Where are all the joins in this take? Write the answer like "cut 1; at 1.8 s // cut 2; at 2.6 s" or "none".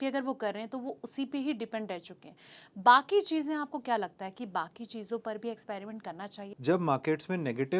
cut 1; at 6.4 s